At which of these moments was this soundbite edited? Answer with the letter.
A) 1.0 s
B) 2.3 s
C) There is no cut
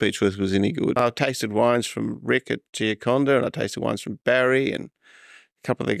A